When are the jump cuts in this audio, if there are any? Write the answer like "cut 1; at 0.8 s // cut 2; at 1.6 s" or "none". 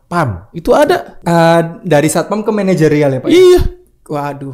cut 1; at 1.1 s

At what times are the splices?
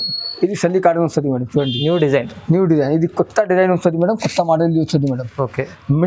none

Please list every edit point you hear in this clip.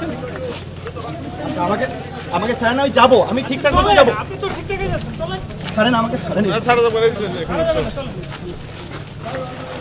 none

